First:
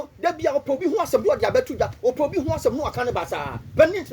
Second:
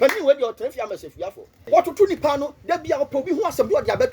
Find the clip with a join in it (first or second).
second